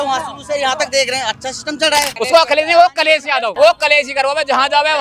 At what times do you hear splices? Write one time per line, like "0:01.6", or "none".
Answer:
0:02.1
0:03.5

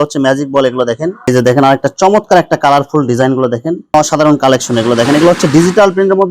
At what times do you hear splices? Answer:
0:01.3
0:03.8

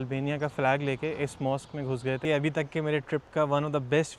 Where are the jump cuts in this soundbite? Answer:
0:02.2

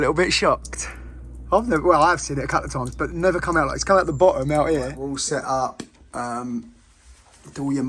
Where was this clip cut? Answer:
0:04.9

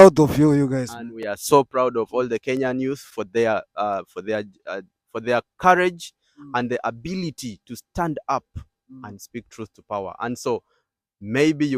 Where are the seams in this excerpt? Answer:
none

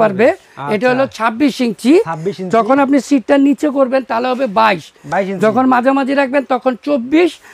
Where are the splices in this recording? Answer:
none

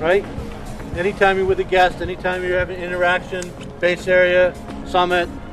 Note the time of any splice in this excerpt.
none

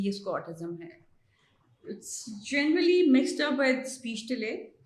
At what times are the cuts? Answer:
none

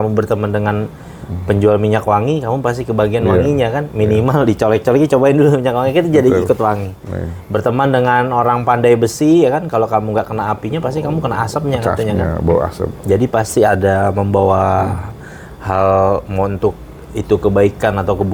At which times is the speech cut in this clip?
none

